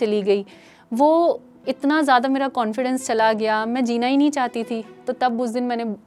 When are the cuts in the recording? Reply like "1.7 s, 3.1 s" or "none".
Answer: none